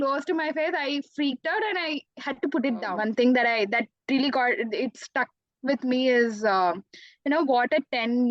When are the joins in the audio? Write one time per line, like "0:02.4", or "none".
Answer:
0:02.9